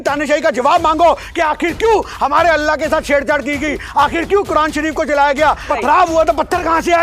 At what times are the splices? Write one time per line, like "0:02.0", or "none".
0:05.7